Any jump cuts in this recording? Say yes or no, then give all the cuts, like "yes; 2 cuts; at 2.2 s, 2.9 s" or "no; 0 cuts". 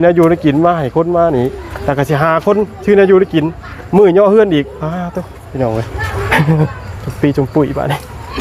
no; 0 cuts